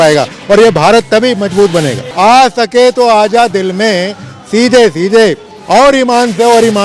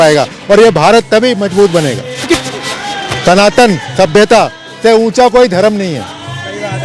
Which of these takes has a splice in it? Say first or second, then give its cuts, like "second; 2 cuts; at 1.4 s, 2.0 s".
first; 1 cut; at 2.0 s